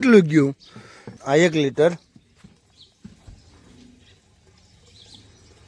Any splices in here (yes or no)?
yes